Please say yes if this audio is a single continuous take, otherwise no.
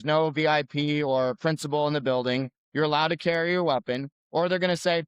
yes